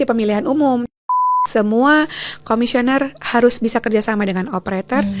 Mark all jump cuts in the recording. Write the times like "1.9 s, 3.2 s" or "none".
1.0 s